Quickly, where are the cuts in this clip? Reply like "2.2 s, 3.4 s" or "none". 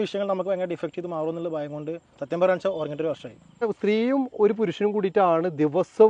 3.7 s